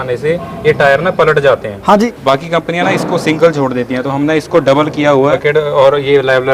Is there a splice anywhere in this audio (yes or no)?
yes